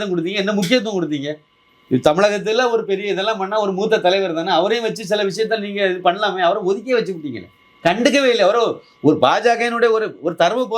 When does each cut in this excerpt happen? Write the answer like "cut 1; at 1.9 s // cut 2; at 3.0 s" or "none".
none